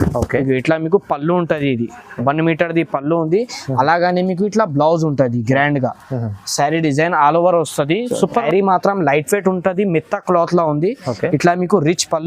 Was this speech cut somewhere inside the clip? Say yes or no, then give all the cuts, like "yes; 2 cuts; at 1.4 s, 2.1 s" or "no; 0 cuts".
yes; 1 cut; at 8.4 s